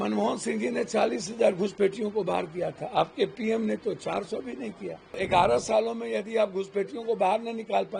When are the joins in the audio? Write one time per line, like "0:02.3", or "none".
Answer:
0:05.2